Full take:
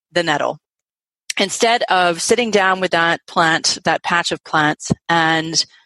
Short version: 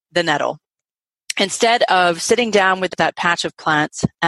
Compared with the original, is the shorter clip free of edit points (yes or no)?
no